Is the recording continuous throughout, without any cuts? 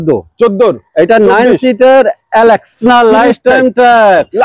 no; 1 cut; at 2.8 s

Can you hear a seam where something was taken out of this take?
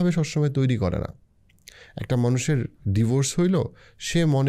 no; 0 cuts

